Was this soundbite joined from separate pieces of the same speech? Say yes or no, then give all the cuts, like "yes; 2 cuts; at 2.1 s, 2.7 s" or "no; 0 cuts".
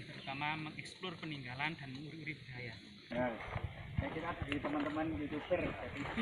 yes; 1 cut; at 3.1 s